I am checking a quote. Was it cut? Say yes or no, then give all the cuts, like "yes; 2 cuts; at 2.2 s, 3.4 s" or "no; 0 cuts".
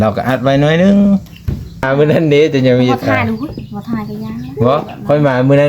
yes; 1 cut; at 1.8 s